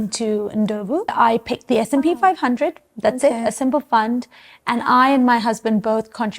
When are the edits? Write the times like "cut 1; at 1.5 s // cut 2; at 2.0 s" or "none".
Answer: cut 1; at 1.1 s